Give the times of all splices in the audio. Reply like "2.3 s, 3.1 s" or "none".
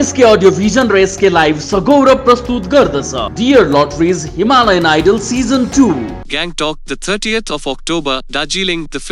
none